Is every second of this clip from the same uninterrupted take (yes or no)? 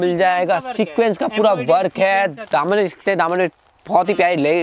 yes